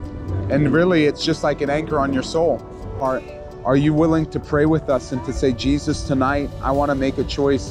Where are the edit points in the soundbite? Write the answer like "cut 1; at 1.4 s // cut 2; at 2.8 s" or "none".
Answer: cut 1; at 3.0 s